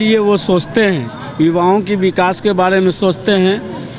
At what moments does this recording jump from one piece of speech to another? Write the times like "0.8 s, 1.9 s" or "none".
none

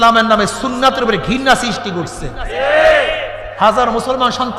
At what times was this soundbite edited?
none

